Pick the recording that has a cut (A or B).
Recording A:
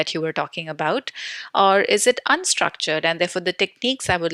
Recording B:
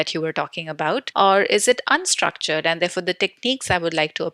B